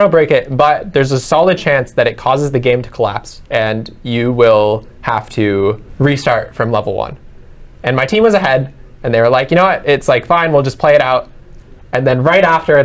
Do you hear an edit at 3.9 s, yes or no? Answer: no